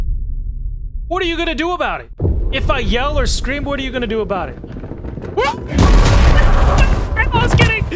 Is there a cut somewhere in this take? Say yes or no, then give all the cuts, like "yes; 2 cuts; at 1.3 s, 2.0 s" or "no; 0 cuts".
yes; 1 cut; at 2.1 s